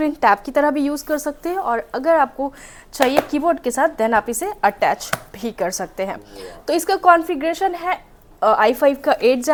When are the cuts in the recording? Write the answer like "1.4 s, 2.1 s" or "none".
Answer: none